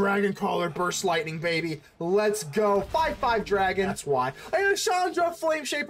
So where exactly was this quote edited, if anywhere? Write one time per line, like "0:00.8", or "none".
0:04.0